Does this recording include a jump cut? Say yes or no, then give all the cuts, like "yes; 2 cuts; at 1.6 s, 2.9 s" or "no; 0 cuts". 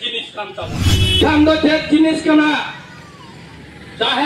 yes; 1 cut; at 1.0 s